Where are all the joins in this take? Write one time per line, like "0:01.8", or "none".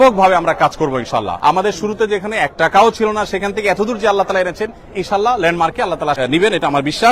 0:01.3
0:06.2